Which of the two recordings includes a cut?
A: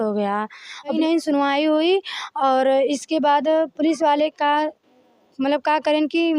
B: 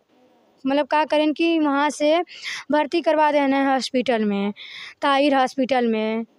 A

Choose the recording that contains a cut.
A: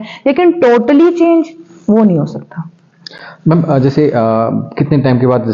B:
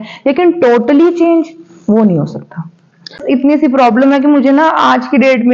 B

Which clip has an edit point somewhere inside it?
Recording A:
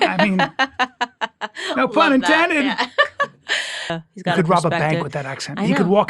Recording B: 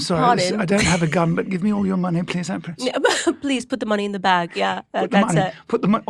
A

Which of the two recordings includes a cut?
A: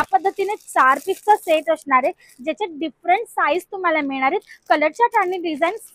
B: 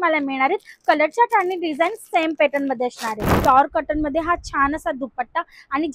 B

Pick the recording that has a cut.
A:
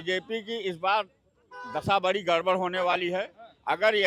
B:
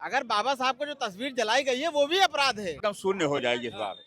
B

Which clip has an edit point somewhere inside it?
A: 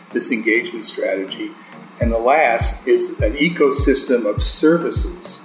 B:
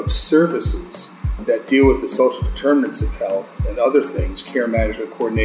A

